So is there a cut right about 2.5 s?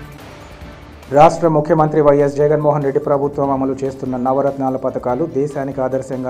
no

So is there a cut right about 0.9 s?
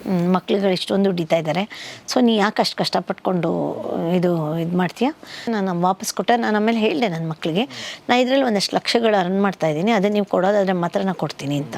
no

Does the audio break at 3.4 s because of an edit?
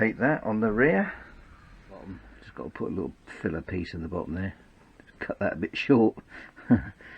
no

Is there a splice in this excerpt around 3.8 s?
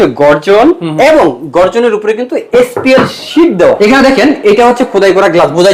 yes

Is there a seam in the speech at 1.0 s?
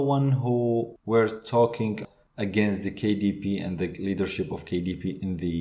yes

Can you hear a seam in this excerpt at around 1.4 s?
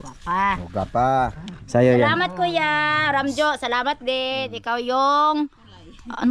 yes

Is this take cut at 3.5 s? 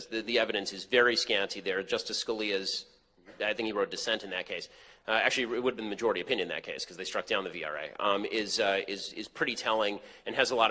yes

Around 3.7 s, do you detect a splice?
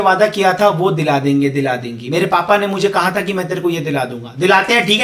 no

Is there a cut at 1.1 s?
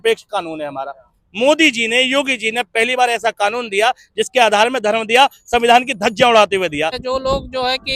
no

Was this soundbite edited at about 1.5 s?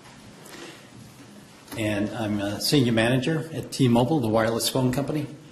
no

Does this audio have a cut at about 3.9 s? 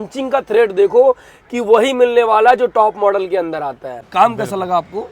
yes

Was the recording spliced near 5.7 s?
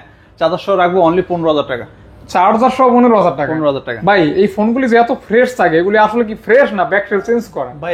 no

